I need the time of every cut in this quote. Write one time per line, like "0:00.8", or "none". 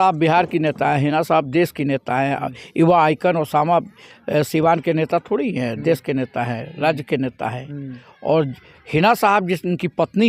none

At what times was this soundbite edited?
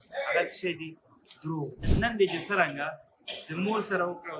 0:01.8

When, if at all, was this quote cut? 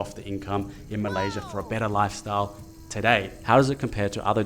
0:03.4

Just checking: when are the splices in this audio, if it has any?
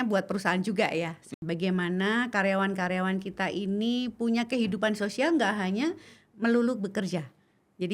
0:01.2

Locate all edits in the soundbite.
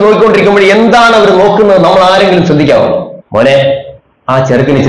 0:03.2

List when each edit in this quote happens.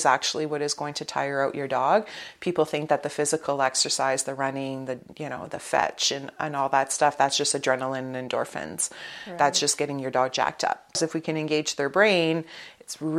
0:11.0

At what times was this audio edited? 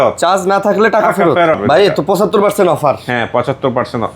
0:01.6

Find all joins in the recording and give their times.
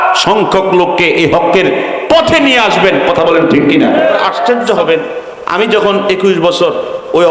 0:04.2

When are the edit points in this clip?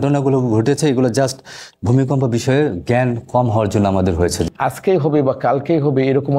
0:04.4

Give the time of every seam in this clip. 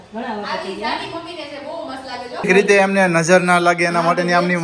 0:02.4

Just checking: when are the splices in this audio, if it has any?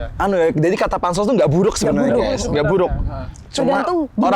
none

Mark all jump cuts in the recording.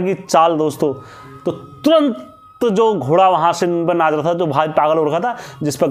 none

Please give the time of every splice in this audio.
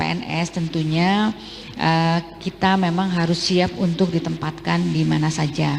none

